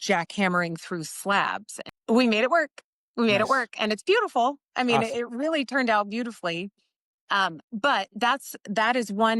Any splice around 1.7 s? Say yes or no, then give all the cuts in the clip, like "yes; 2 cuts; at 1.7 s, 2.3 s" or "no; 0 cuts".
yes; 1 cut; at 1.7 s